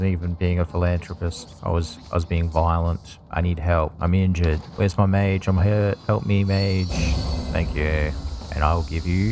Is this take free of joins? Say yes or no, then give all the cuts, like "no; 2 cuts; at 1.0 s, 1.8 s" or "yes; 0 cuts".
yes; 0 cuts